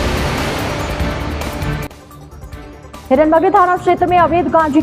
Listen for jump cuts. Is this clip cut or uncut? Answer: uncut